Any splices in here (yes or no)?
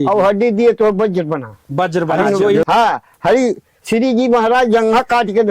yes